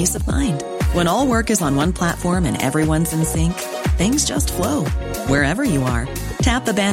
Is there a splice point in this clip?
no; 0 cuts

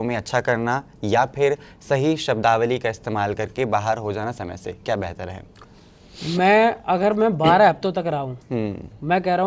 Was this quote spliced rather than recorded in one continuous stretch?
no; 0 cuts

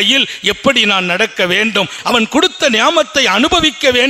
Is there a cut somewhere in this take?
yes; 1 cut; at 1.9 s

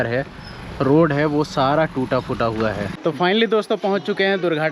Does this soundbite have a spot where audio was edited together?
yes; 1 cut; at 2.9 s

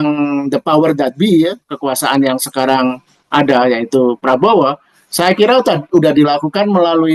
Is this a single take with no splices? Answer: yes; 0 cuts

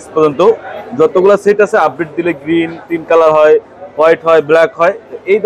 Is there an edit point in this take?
no; 0 cuts

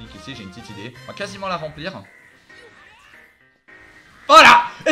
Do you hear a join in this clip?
yes; 1 cut; at 1.0 s

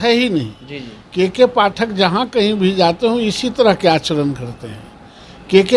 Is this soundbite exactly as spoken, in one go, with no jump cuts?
yes; 0 cuts

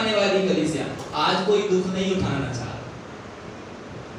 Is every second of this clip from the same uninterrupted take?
yes; 0 cuts

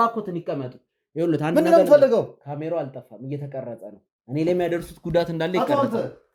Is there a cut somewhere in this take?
no; 0 cuts

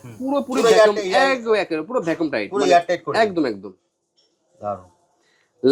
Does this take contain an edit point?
no; 0 cuts

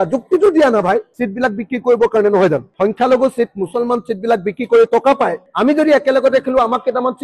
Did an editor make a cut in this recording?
yes; 2 cuts; at 1.1 s, 5.4 s

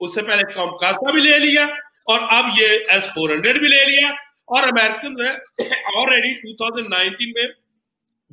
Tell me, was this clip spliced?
no; 0 cuts

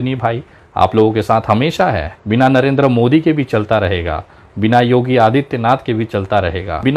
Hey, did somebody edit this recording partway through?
yes; 1 cut; at 2.1 s

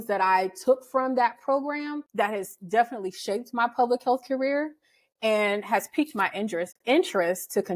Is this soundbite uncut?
no; 1 cut; at 2.0 s

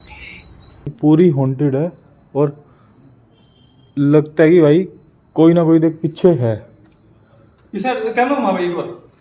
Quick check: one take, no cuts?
no; 1 cut; at 0.9 s

